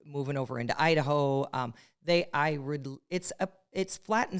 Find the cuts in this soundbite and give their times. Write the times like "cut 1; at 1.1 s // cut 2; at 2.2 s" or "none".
none